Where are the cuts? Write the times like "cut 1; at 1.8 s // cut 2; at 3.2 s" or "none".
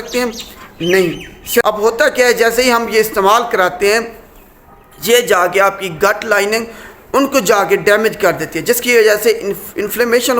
cut 1; at 1.6 s